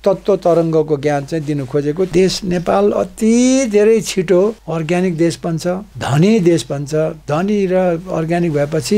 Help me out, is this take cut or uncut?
cut